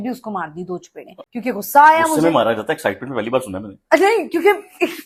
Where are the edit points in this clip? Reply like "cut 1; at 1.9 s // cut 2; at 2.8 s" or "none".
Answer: none